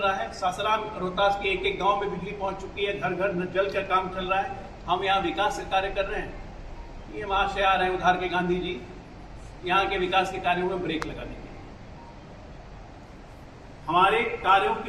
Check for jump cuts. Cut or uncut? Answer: uncut